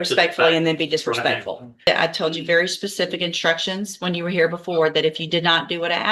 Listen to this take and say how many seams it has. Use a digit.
1